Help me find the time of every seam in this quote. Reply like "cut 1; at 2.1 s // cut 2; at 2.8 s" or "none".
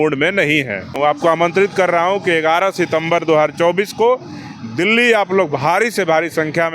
cut 1; at 1.0 s